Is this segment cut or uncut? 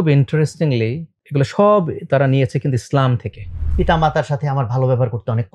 cut